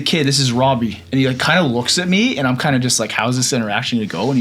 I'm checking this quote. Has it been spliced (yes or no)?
no